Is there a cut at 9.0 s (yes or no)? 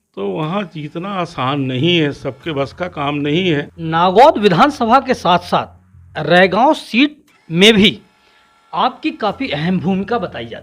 no